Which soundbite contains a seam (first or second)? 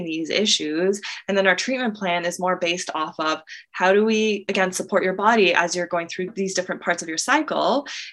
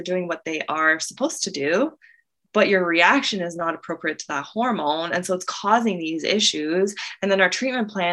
first